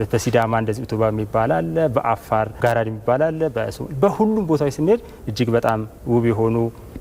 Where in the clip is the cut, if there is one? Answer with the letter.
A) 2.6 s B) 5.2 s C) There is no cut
A